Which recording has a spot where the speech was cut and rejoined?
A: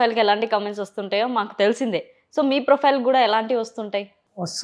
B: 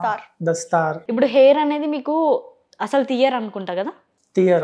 B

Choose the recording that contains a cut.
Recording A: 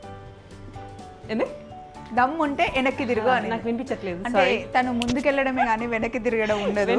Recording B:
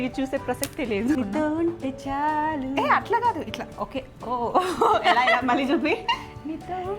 B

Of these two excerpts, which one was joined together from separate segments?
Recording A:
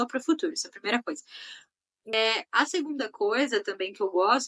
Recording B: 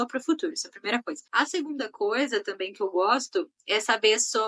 B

